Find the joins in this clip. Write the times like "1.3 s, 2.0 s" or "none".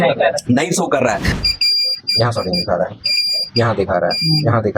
1.4 s